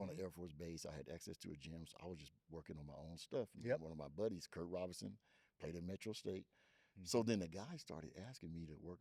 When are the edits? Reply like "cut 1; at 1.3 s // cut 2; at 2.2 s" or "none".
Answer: none